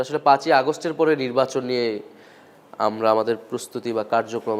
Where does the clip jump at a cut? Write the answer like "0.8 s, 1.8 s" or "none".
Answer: none